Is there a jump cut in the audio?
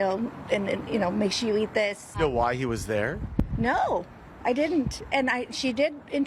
no; 0 cuts

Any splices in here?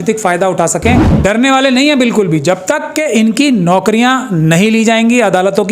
yes; 1 cut; at 1.1 s

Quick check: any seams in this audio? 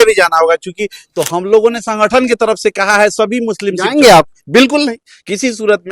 yes; 1 cut; at 1.0 s

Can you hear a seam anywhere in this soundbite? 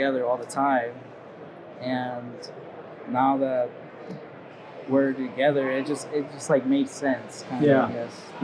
no; 0 cuts

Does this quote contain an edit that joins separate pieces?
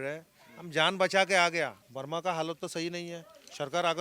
yes; 1 cut; at 1.8 s

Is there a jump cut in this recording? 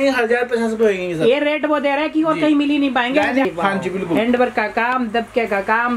yes; 1 cut; at 3.5 s

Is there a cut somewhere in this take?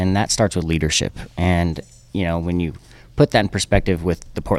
no; 0 cuts

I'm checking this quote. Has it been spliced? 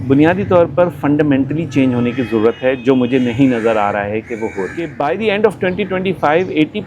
yes; 1 cut; at 4.9 s

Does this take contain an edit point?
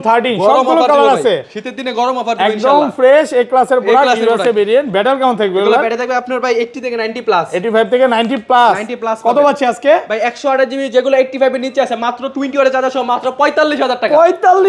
no; 0 cuts

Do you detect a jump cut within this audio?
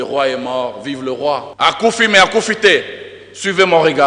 yes; 1 cut; at 1.5 s

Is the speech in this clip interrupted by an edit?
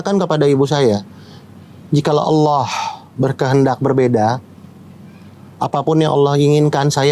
no; 0 cuts

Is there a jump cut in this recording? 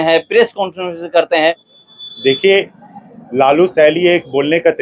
yes; 1 cut; at 1.6 s

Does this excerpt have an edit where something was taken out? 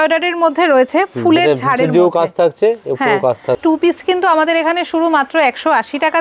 yes; 1 cut; at 3.6 s

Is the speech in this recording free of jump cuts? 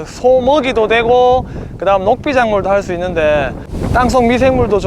no; 1 cut; at 3.7 s

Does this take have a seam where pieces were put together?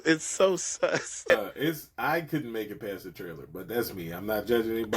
yes; 1 cut; at 1.3 s

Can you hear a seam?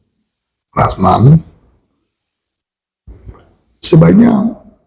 no; 0 cuts

